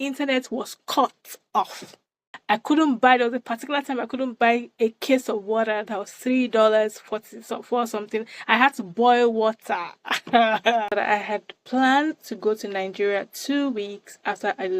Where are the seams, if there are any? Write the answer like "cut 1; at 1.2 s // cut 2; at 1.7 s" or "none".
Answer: cut 1; at 2.3 s // cut 2; at 10.9 s